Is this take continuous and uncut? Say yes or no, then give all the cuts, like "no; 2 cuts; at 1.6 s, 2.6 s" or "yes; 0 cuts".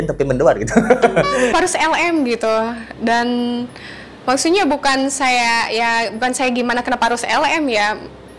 no; 1 cut; at 1.5 s